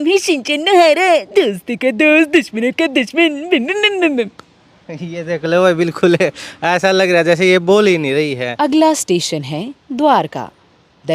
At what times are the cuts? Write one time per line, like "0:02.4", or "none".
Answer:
0:08.6